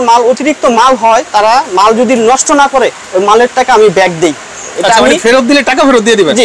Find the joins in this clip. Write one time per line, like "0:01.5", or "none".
none